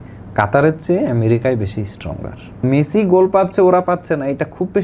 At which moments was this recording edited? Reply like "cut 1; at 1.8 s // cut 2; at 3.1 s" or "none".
cut 1; at 2.6 s